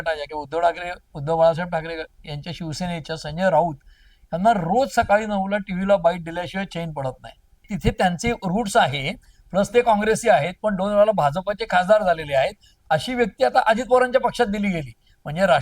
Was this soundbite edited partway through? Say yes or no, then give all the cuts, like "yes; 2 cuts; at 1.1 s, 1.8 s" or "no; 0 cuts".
yes; 1 cut; at 7.6 s